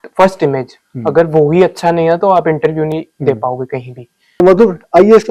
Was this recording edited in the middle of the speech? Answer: yes; 1 cut; at 4.4 s

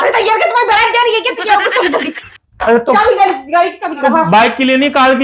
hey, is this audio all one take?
no; 2 cuts; at 3.0 s, 4.1 s

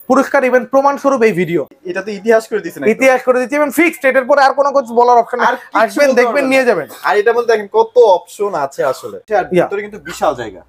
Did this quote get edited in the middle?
yes; 2 cuts; at 1.7 s, 9.1 s

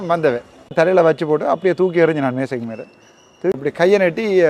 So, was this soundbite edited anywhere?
yes; 2 cuts; at 0.7 s, 3.6 s

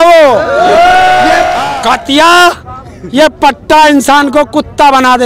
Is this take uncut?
no; 1 cut; at 1.6 s

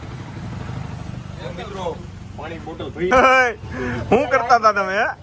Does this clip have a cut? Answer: yes; 1 cut; at 3.1 s

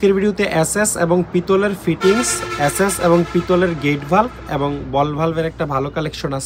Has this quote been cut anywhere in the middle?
no; 0 cuts

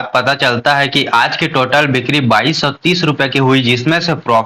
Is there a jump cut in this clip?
no; 0 cuts

